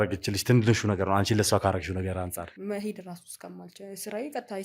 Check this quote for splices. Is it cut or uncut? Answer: cut